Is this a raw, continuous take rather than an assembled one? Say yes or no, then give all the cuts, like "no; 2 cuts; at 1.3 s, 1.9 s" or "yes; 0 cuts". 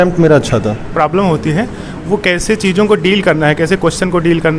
no; 1 cut; at 0.9 s